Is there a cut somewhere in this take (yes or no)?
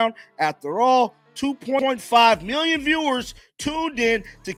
no